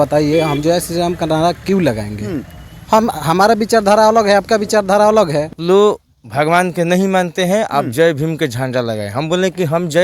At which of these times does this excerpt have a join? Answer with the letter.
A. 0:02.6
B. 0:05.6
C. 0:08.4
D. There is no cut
B